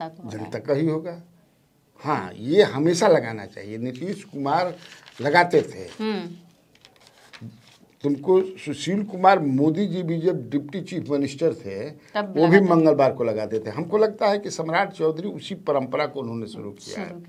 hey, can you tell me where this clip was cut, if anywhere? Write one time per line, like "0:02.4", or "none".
none

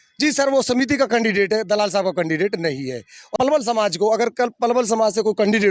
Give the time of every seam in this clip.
0:03.2

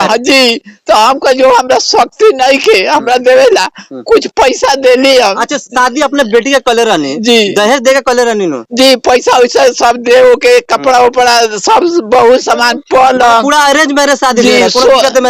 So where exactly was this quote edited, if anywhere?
none

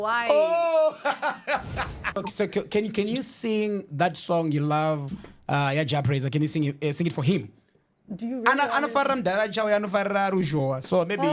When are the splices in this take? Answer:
0:02.1

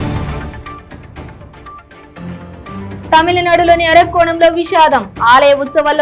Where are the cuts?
0:01.1

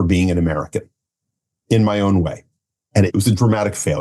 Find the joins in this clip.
0:02.8

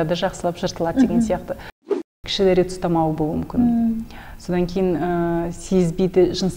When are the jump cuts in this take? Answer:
0:02.0

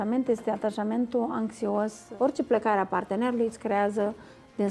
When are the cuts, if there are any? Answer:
0:02.0

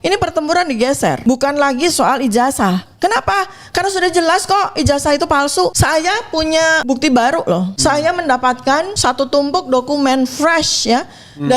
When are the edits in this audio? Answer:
0:01.2
0:05.8
0:06.8
0:07.7
0:08.9

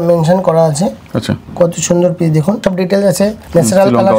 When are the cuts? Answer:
0:01.4
0:02.8

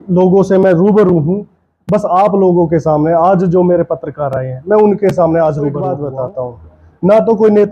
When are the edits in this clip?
0:06.0

